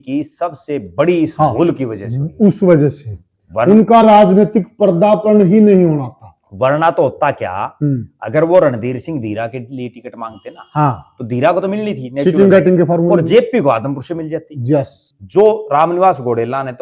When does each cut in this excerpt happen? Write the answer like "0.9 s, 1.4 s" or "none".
15.0 s